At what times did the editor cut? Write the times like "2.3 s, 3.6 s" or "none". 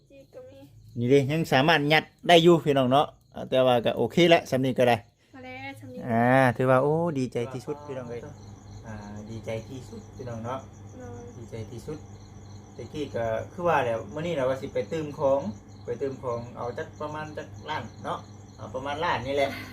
7.8 s